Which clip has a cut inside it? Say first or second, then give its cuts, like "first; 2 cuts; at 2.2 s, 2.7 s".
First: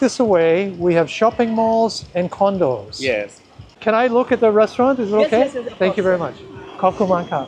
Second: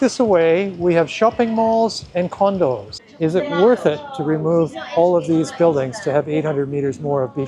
second; 1 cut; at 2.9 s